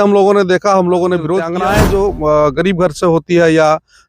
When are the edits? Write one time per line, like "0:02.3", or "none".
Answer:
0:01.5